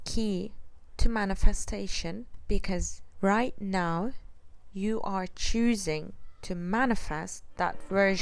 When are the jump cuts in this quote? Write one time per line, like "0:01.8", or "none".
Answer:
none